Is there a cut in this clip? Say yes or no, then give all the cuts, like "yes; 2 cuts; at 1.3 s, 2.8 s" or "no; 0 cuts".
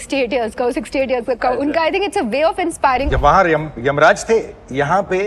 yes; 1 cut; at 3.1 s